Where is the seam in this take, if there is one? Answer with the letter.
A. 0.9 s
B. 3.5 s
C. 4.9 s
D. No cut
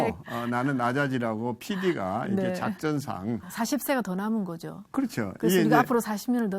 B